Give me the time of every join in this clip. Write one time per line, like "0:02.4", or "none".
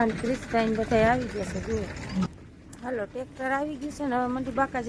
0:02.3